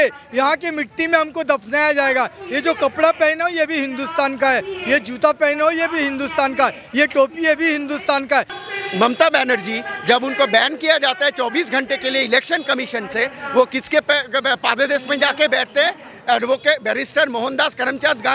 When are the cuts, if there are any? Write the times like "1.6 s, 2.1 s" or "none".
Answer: 8.6 s